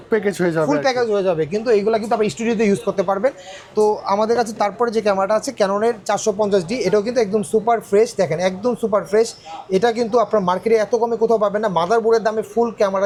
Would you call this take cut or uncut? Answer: uncut